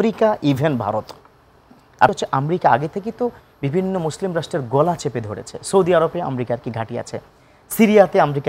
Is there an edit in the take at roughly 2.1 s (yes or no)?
yes